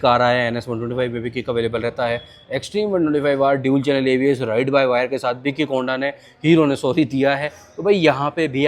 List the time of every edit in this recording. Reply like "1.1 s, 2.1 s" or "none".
none

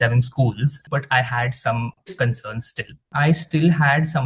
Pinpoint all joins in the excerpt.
0.8 s, 3.1 s

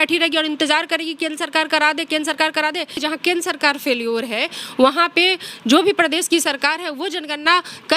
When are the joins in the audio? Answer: 3.0 s

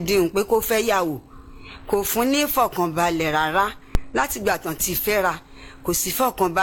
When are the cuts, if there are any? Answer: none

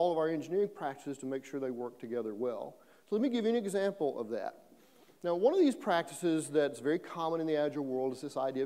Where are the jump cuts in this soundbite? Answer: 3.8 s

